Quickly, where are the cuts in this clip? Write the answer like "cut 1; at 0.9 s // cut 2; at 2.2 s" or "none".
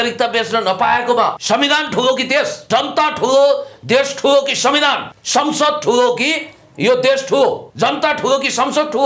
cut 1; at 1.3 s // cut 2; at 2.6 s // cut 3; at 5.1 s // cut 4; at 7.7 s